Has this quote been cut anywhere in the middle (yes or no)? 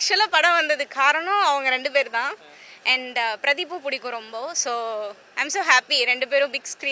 no